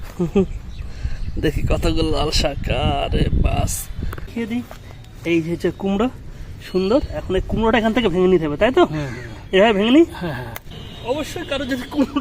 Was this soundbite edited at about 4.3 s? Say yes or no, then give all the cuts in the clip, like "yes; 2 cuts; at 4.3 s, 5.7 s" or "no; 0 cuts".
yes; 2 cuts; at 4.3 s, 10.5 s